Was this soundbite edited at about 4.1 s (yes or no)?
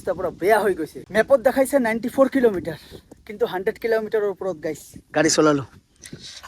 no